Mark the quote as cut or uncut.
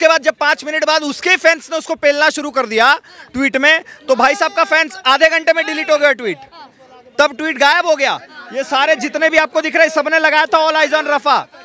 uncut